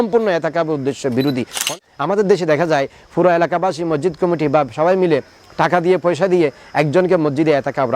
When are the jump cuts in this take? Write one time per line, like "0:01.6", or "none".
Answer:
0:01.6